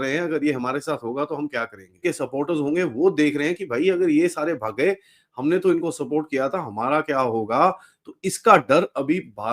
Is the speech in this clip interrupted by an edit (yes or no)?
no